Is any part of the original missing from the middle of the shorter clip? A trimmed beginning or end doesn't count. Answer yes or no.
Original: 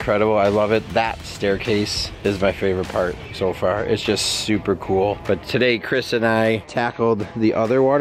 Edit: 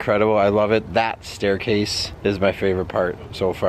no